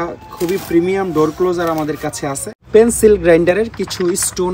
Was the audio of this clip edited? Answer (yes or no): yes